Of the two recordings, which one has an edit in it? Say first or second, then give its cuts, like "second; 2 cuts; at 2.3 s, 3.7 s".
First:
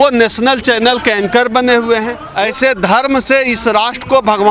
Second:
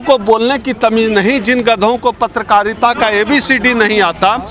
first; 1 cut; at 2.2 s